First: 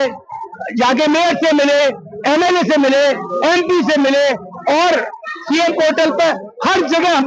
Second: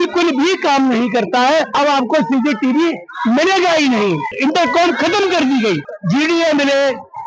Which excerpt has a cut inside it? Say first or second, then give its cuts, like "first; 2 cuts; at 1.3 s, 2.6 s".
second; 3 cuts; at 1.7 s, 4.3 s, 5.9 s